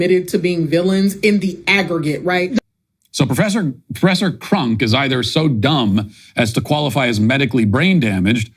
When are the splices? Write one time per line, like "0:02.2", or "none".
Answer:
0:02.6